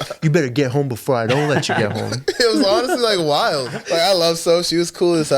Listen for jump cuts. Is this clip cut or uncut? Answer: cut